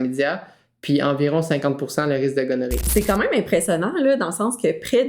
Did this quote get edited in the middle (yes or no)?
yes